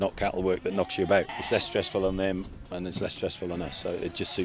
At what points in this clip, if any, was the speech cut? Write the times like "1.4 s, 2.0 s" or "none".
1.4 s